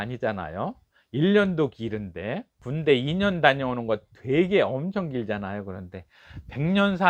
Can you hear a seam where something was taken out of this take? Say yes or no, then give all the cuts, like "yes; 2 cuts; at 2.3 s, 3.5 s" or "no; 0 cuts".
no; 0 cuts